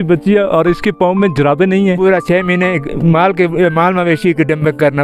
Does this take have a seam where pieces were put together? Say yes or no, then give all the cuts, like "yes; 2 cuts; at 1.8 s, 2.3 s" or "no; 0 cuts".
yes; 1 cut; at 2.0 s